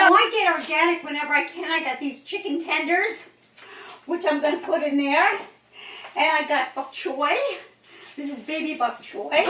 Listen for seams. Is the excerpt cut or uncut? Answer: uncut